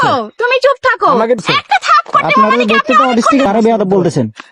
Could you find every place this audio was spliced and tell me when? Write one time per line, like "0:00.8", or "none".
0:01.5
0:03.5